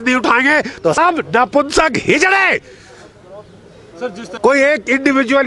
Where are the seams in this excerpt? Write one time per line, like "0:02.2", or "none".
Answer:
0:01.0
0:04.2

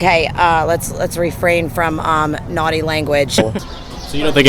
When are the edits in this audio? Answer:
0:03.5

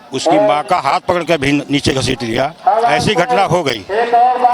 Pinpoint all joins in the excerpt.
none

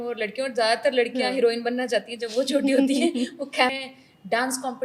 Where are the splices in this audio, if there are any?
0:03.7

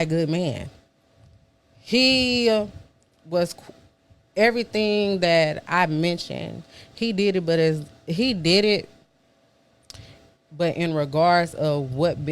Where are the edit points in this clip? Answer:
0:10.4

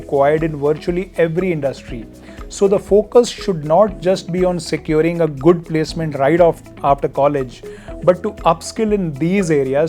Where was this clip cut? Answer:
none

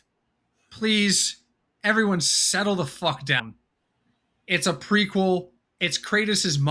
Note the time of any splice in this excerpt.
0:03.4

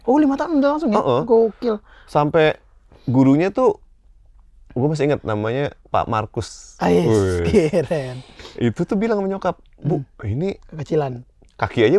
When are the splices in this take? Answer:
none

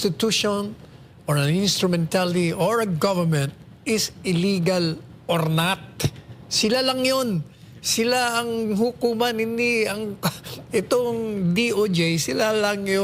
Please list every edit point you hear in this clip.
none

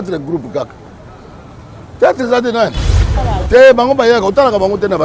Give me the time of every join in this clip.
0:03.1

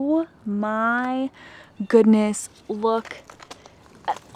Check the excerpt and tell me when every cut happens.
none

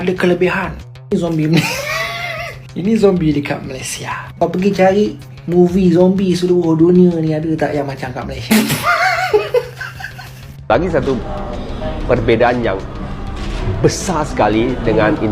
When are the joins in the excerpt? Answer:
0:08.4

